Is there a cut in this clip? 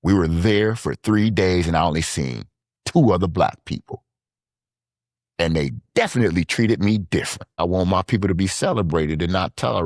yes; 1 cut; at 7.6 s

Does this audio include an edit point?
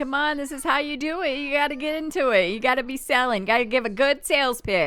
no; 0 cuts

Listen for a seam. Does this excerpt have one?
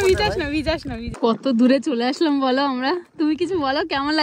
yes; 1 cut; at 1.0 s

